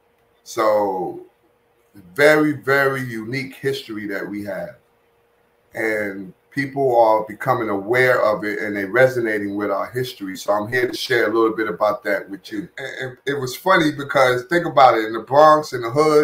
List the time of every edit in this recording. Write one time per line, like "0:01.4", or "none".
0:13.1